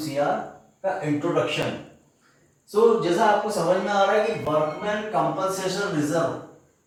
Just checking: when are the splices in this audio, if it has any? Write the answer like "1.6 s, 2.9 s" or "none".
none